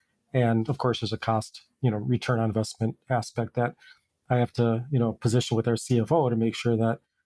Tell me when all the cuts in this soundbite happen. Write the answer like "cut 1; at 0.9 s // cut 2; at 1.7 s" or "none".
none